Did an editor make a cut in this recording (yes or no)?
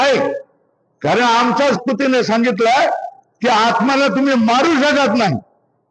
yes